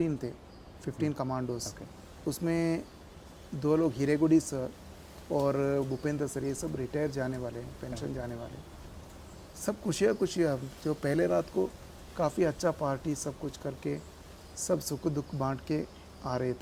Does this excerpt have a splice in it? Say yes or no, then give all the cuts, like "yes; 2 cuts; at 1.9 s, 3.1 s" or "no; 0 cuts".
no; 0 cuts